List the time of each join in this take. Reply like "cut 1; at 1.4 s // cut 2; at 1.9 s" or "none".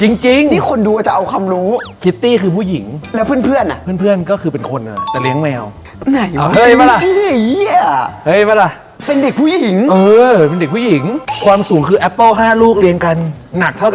none

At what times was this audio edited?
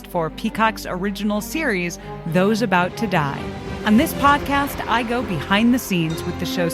cut 1; at 3.7 s

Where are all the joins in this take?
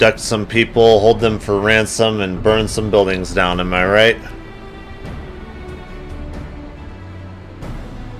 none

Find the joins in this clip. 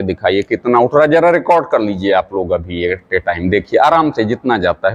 none

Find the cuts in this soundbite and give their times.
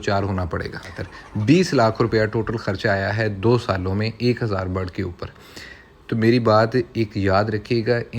cut 1; at 0.9 s

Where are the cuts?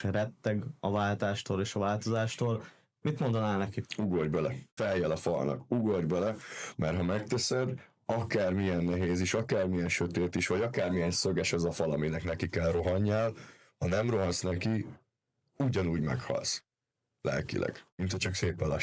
cut 1; at 4.6 s // cut 2; at 17.9 s

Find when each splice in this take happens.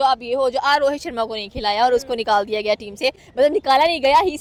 none

